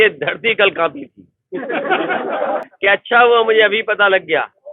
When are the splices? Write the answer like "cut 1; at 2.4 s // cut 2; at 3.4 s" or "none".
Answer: cut 1; at 2.7 s